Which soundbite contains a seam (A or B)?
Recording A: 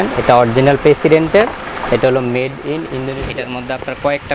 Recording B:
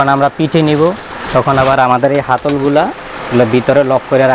A